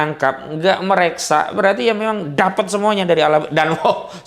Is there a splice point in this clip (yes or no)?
no